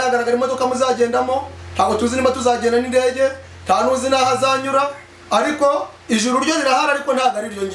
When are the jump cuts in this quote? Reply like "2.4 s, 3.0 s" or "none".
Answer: none